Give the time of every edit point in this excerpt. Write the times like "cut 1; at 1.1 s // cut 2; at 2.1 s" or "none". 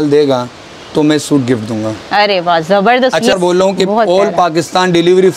cut 1; at 3.3 s